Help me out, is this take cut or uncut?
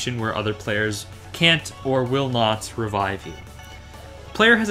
uncut